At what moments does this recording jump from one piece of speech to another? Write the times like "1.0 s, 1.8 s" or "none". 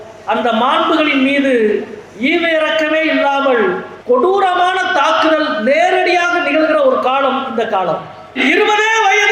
3.9 s, 8.4 s